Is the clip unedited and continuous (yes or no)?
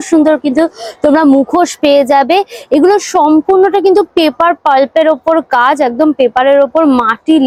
yes